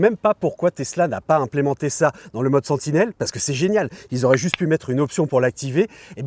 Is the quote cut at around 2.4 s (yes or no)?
no